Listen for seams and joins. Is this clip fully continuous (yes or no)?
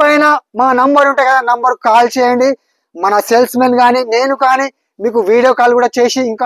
yes